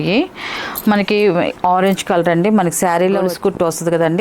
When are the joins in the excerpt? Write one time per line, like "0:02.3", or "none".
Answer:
0:03.3